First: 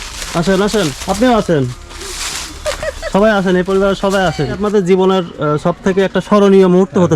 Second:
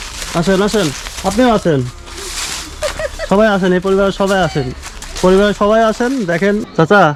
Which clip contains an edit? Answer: first; 2 cuts; at 1.0 s, 4.6 s

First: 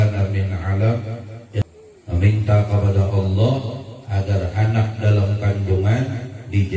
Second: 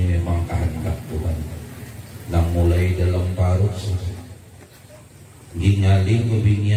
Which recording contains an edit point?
first; 1 cut; at 1.6 s

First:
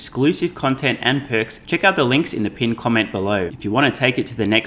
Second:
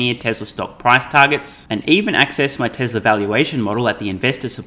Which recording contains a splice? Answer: first; 2 cuts; at 1.6 s, 3.5 s

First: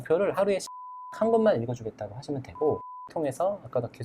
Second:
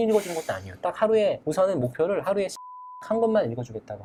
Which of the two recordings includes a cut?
first; 1 cut; at 3.1 s

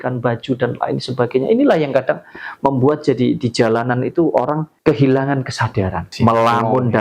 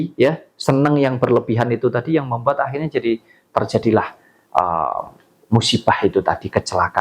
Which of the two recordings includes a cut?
first; 2 cuts; at 4.7 s, 6.1 s

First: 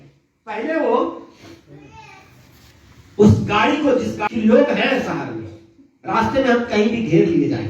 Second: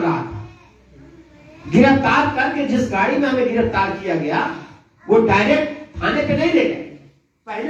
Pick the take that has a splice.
first; 1 cut; at 4.2 s

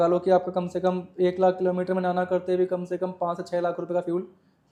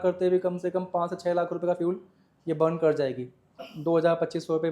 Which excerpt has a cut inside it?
second; 1 cut; at 3.7 s

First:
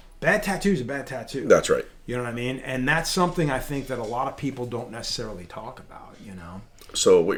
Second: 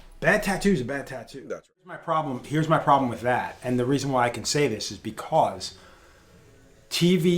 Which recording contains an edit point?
second; 1 cut; at 2.1 s

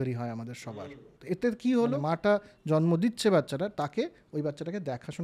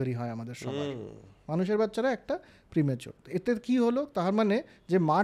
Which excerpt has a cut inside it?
first; 2 cuts; at 1.1 s, 2.0 s

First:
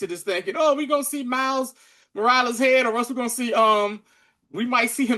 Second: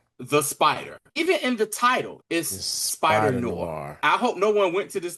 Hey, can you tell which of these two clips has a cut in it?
second; 3 cuts; at 1.1 s, 2.2 s, 3.9 s

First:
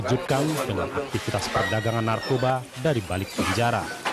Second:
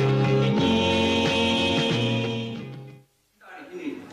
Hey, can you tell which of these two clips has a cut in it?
first; 1 cut; at 2.4 s

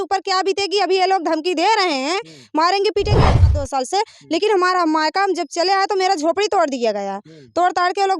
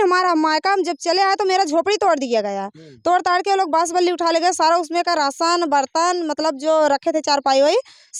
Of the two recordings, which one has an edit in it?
first; 1 cut; at 3.4 s

